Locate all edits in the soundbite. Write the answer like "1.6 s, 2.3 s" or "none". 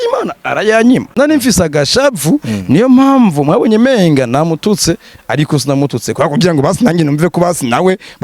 1.1 s